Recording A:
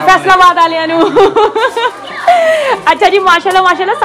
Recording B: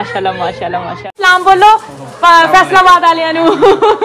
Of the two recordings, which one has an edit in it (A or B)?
B